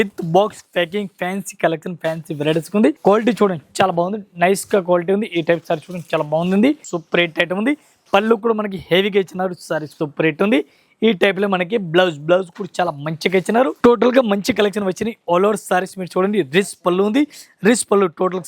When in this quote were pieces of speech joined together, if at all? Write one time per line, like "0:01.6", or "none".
0:03.0
0:06.9
0:10.0
0:13.7